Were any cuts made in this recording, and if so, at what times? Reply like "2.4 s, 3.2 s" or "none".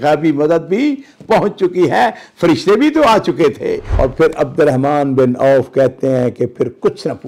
3.9 s